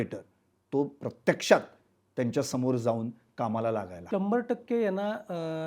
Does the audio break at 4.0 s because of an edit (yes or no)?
yes